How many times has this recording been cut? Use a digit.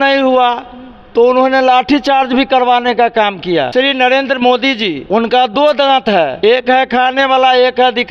3